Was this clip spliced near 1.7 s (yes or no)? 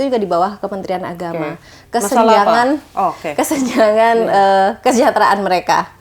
yes